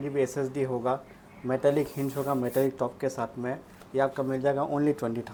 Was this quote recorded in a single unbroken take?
yes; 0 cuts

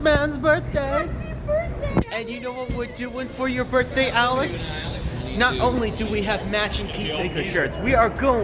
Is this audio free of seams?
yes; 0 cuts

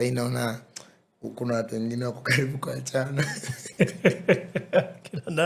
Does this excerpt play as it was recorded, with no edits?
yes; 0 cuts

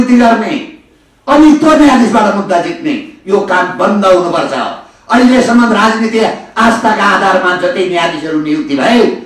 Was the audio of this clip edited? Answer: no; 0 cuts

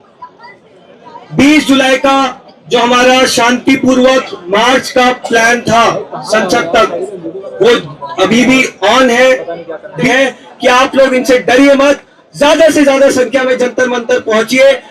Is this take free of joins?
no; 1 cut; at 10.1 s

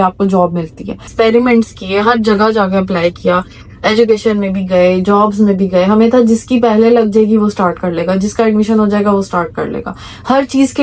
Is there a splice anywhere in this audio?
yes; 1 cut; at 1.1 s

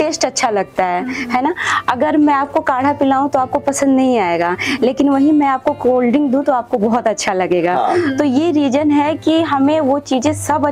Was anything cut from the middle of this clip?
no; 0 cuts

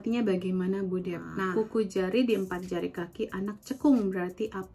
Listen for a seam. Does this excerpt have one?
yes; 1 cut; at 1.5 s

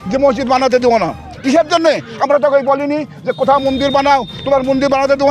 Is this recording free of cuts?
yes; 0 cuts

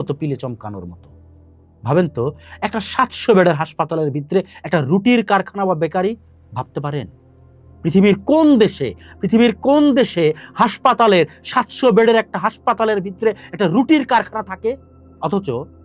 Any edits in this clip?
no; 0 cuts

